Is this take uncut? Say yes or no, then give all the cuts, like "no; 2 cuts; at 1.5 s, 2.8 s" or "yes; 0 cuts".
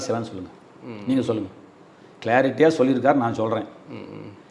yes; 0 cuts